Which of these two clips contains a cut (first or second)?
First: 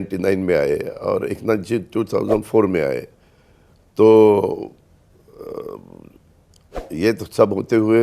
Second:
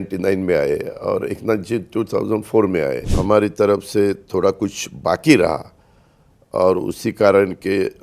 second